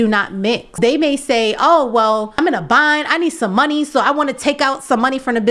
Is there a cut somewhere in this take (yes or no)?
yes